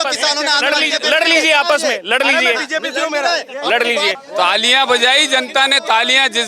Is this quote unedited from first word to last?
no; 1 cut; at 4.1 s

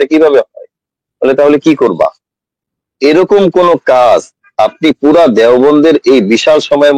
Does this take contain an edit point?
yes; 1 cut; at 2.7 s

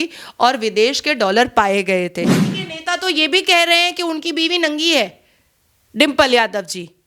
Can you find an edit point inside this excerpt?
yes; 1 cut; at 2.4 s

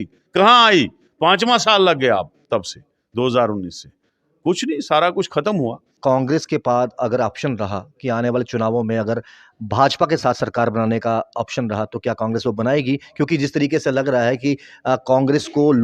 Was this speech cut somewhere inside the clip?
yes; 1 cut; at 5.8 s

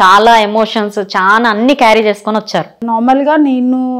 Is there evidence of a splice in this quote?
yes; 1 cut; at 2.8 s

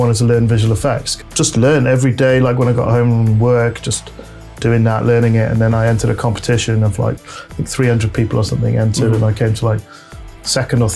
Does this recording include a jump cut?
yes; 1 cut; at 1.1 s

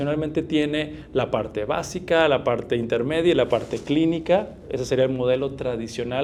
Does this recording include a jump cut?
no; 0 cuts

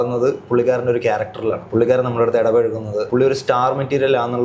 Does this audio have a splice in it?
yes; 2 cuts; at 1.6 s, 3.1 s

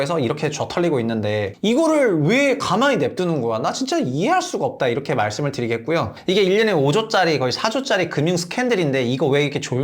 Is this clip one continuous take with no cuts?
no; 1 cut; at 6.2 s

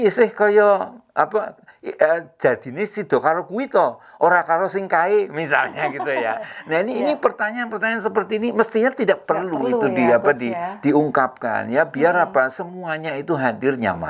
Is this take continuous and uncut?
yes; 0 cuts

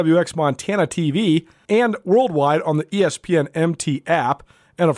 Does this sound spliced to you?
yes; 1 cut; at 1.5 s

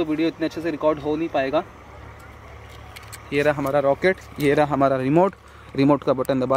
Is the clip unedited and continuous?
yes; 0 cuts

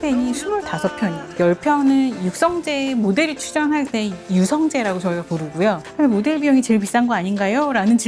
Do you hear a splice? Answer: no; 0 cuts

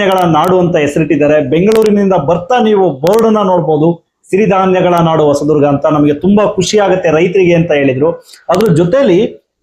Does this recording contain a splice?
no; 0 cuts

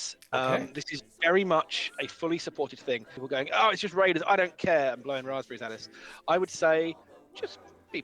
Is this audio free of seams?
no; 1 cut; at 3.1 s

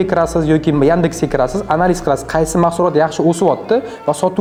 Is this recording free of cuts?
yes; 0 cuts

